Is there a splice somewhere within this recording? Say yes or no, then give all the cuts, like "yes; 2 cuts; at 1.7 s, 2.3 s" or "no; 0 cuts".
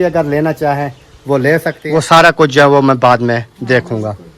yes; 1 cut; at 1.8 s